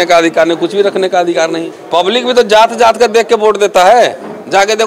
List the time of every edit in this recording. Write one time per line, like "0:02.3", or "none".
0:01.7

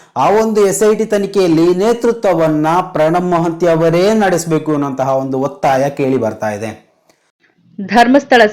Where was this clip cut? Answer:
0:07.3

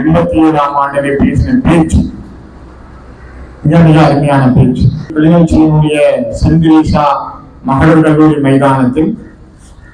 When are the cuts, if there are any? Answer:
0:05.1

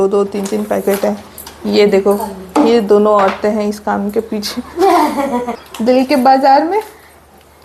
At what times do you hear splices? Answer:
0:05.5

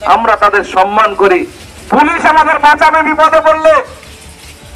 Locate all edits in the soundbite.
none

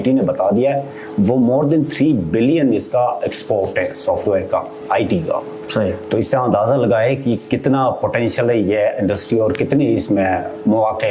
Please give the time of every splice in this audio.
none

